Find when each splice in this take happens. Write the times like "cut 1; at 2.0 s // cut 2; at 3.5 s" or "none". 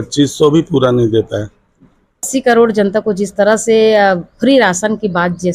cut 1; at 2.2 s